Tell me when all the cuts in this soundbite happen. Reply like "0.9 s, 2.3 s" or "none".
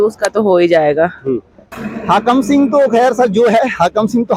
1.6 s